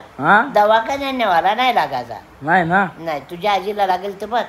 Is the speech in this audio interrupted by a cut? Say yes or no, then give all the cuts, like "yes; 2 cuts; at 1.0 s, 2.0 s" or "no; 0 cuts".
no; 0 cuts